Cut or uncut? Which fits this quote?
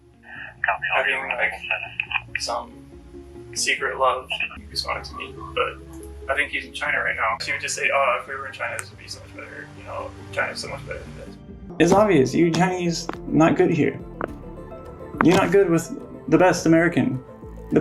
cut